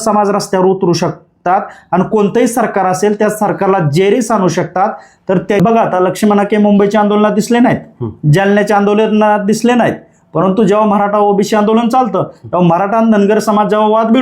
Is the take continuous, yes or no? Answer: no